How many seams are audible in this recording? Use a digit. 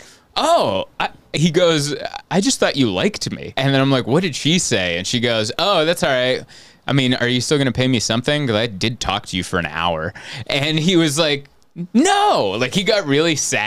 1